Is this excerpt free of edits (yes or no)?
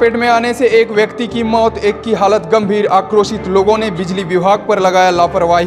yes